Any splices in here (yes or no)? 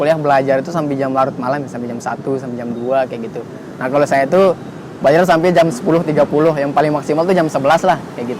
no